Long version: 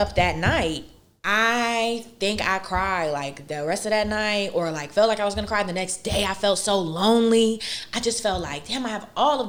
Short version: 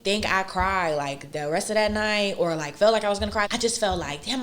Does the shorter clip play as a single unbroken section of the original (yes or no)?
no